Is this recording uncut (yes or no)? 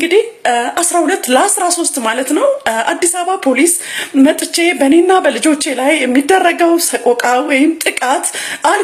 yes